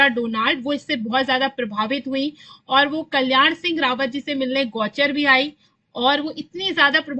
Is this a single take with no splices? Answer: yes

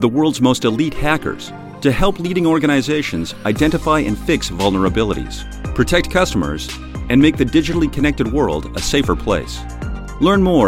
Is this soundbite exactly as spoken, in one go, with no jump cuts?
yes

